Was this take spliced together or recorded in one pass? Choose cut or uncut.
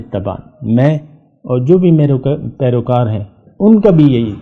uncut